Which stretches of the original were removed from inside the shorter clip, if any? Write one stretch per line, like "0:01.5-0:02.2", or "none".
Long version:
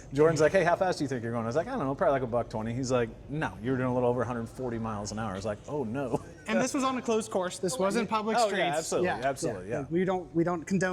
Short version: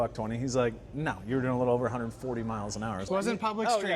0:05.4-0:07.7